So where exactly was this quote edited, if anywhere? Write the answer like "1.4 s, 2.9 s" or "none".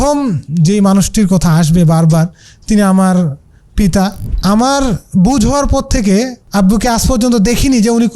4.3 s, 6.4 s